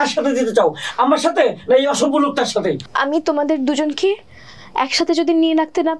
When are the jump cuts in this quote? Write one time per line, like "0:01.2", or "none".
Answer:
0:02.9